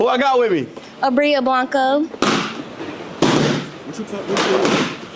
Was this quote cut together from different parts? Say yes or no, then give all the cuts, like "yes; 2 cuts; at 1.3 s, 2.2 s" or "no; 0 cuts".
yes; 1 cut; at 2.1 s